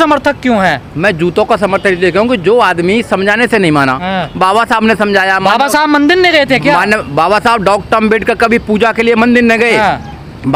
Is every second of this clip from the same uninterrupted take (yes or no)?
yes